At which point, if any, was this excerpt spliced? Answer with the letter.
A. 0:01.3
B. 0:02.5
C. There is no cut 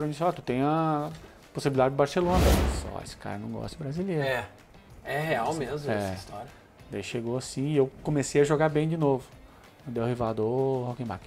B